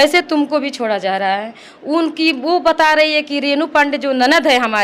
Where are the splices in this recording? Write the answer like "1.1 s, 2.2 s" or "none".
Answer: none